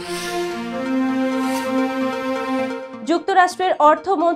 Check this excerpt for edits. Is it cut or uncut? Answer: uncut